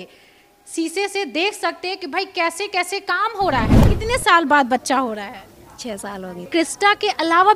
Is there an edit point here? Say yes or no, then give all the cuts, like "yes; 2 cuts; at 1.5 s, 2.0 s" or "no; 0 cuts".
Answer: yes; 2 cuts; at 3.8 s, 6.5 s